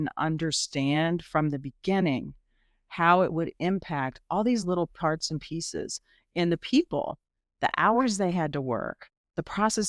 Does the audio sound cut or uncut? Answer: uncut